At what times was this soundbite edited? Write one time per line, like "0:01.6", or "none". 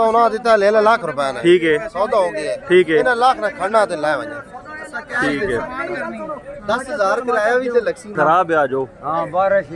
0:08.1